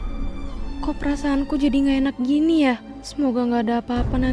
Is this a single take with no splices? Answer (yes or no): yes